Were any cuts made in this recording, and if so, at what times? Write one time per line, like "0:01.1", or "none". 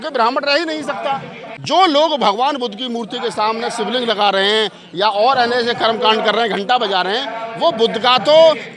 0:01.4